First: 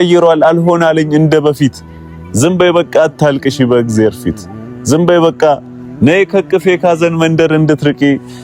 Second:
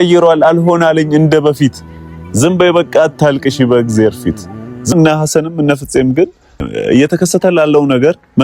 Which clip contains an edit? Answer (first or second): second